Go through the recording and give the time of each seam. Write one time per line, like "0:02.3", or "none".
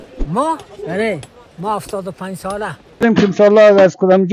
0:03.0